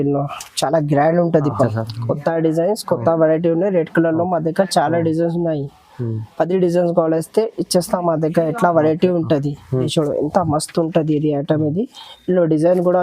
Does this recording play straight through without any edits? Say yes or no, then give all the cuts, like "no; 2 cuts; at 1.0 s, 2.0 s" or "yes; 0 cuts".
no; 2 cuts; at 1.7 s, 9.9 s